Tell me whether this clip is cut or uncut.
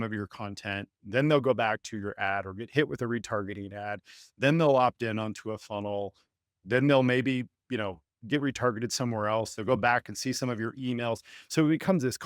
uncut